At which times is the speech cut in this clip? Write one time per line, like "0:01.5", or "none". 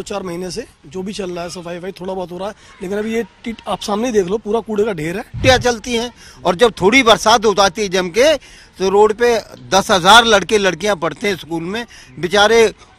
0:05.4